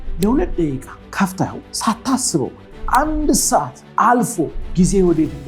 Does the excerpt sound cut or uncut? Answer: cut